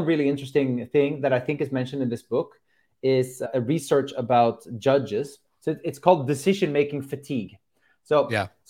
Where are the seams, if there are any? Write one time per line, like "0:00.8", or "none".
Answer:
0:03.5